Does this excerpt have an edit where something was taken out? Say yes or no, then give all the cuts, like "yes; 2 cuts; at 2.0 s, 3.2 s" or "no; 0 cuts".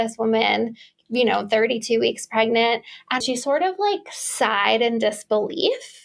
yes; 1 cut; at 3.2 s